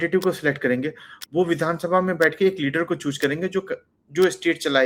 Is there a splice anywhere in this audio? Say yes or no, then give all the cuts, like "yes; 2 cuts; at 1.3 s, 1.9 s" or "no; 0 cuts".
no; 0 cuts